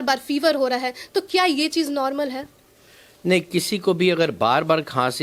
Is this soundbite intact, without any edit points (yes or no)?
yes